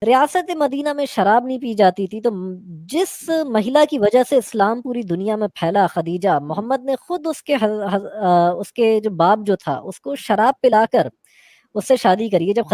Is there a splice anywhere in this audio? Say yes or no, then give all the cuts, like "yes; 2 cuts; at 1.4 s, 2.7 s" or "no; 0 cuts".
no; 0 cuts